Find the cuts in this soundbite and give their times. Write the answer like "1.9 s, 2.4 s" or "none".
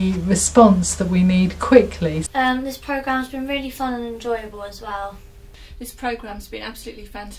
2.2 s, 5.3 s